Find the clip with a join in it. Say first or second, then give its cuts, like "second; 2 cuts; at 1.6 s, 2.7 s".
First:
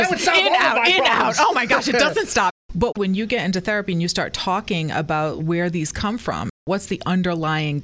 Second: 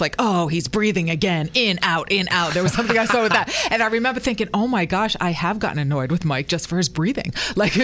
first; 2 cuts; at 2.9 s, 6.6 s